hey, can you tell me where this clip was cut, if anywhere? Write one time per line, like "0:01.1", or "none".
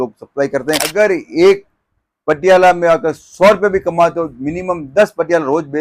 0:00.9